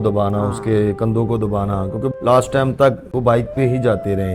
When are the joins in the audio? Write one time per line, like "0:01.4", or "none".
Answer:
0:02.1
0:03.1